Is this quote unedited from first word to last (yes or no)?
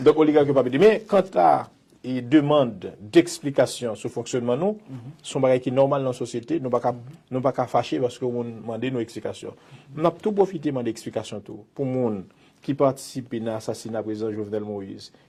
yes